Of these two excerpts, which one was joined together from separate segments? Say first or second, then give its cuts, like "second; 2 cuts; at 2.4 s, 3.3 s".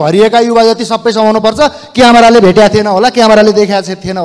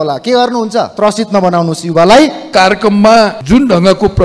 second; 3 cuts; at 0.9 s, 2.5 s, 3.4 s